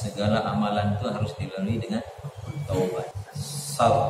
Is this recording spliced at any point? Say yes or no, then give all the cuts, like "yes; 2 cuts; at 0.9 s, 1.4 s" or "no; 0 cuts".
yes; 1 cut; at 3.2 s